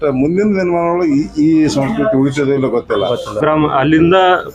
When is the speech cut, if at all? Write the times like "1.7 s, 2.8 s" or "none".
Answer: 3.4 s